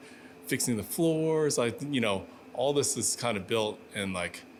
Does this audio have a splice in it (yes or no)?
no